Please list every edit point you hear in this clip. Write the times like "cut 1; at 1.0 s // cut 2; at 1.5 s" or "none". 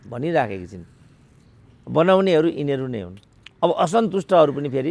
none